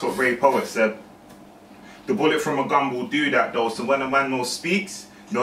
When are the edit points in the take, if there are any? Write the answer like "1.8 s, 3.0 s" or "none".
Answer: 3.6 s